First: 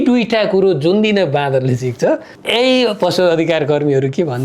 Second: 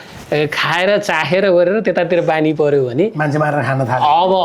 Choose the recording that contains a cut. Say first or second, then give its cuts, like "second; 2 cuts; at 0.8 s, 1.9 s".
first; 1 cut; at 2.3 s